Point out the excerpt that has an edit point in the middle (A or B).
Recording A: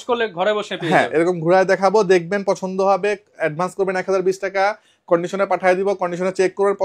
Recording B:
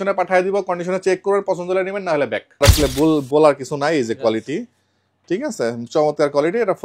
B